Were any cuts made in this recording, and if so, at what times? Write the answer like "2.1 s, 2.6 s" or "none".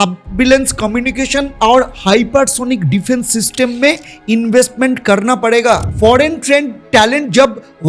1.5 s, 5.9 s